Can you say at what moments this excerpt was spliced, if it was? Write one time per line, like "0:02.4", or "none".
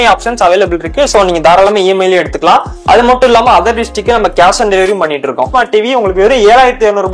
0:05.5

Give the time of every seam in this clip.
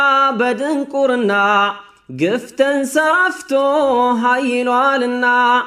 none

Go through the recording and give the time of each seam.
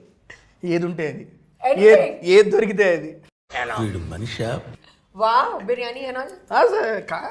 none

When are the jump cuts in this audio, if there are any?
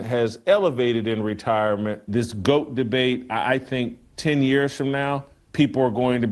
0:02.1
0:05.4

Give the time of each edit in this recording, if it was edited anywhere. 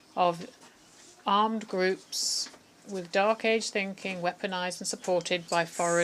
none

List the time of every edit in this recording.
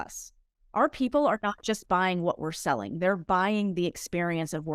none

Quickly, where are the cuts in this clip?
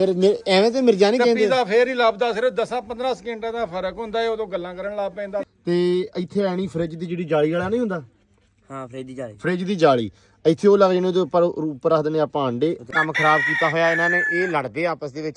0:05.5
0:12.9

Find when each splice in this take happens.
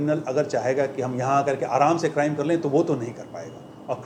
none

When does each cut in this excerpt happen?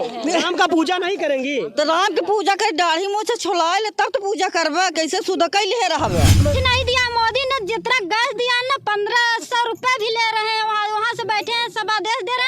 0:06.4

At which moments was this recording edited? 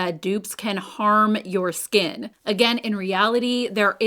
0:02.3

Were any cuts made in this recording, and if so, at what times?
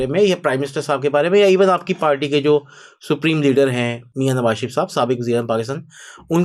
0:04.0

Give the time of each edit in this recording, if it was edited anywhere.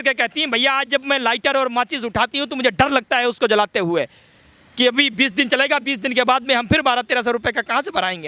none

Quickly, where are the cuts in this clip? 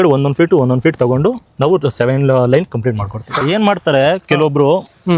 0:03.3

